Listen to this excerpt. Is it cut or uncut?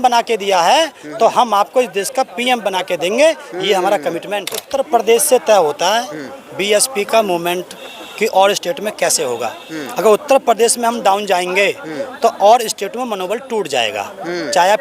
cut